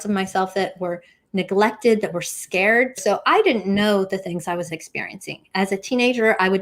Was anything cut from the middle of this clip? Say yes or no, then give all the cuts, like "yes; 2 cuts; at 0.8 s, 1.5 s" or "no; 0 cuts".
yes; 1 cut; at 3.0 s